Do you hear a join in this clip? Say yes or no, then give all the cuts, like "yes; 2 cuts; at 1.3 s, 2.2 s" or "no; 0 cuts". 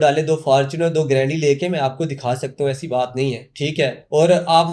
no; 0 cuts